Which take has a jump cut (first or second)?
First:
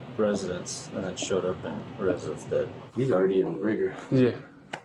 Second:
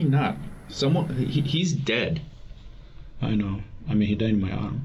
first